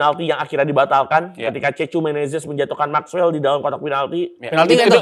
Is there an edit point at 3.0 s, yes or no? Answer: no